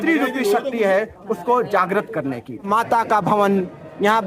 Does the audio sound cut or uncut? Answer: cut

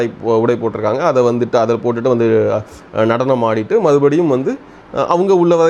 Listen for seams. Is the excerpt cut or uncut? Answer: uncut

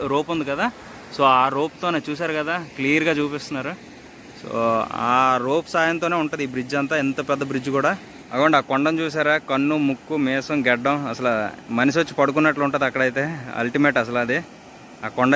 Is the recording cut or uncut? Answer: cut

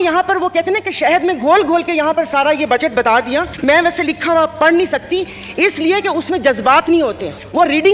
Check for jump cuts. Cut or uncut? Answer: uncut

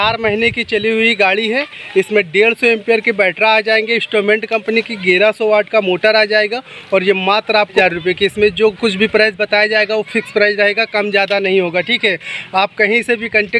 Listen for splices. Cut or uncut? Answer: cut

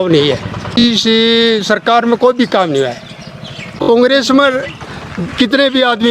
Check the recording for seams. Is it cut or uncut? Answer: cut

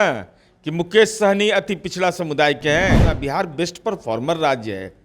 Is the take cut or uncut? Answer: cut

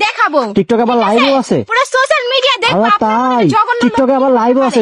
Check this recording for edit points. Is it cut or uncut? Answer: uncut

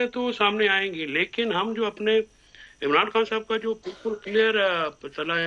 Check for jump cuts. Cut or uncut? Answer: uncut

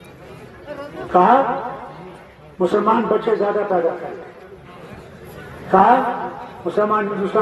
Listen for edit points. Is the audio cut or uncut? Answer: uncut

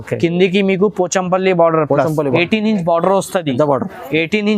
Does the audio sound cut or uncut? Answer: cut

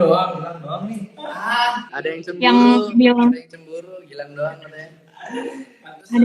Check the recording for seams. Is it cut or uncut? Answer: cut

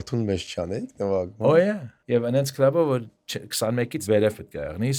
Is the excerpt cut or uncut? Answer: cut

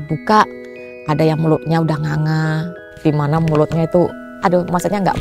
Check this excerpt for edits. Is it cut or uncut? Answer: cut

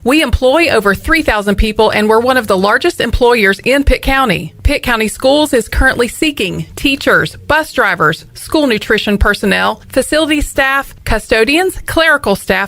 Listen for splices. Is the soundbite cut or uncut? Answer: uncut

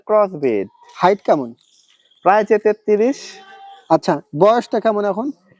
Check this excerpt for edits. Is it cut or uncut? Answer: uncut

